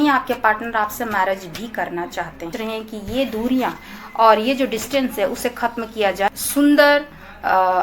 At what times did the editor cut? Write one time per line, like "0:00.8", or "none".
0:02.5
0:06.3